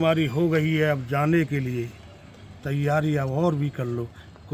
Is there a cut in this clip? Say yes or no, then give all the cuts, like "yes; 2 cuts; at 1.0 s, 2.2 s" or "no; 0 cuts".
no; 0 cuts